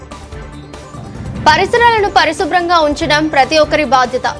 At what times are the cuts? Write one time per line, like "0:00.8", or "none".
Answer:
0:01.0